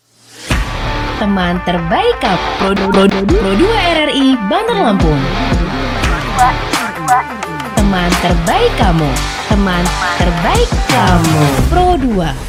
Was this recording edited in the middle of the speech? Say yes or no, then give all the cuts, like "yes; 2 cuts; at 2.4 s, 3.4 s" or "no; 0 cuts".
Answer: no; 0 cuts